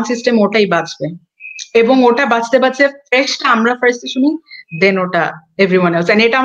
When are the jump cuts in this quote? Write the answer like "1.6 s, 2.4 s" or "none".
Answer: none